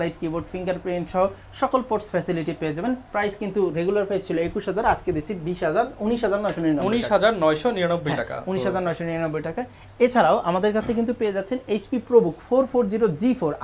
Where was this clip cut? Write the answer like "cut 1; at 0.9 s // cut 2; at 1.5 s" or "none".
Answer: none